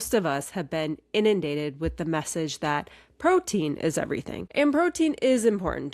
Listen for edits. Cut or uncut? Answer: cut